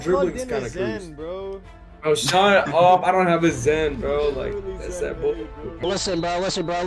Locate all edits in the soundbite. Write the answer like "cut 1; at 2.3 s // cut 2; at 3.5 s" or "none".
cut 1; at 5.8 s